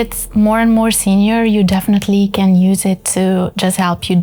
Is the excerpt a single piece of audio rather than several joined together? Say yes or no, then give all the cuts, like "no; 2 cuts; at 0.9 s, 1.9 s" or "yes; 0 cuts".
yes; 0 cuts